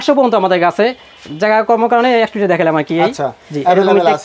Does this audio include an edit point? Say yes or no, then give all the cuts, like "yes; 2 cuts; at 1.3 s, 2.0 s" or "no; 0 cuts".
no; 0 cuts